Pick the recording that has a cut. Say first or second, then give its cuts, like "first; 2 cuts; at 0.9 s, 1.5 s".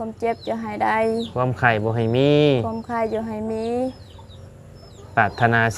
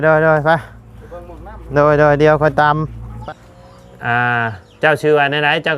second; 1 cut; at 3.1 s